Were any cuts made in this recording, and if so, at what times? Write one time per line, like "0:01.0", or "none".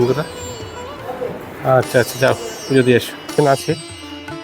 0:03.3